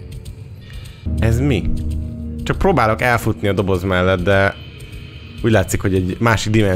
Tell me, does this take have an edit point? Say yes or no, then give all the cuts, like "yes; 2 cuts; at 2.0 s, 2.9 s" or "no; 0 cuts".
yes; 1 cut; at 1.0 s